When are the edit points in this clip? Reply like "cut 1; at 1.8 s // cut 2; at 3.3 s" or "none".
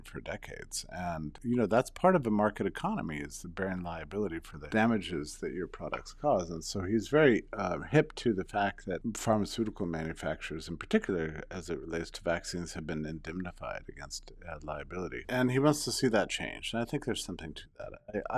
cut 1; at 1.4 s // cut 2; at 4.5 s // cut 3; at 9.0 s // cut 4; at 15.2 s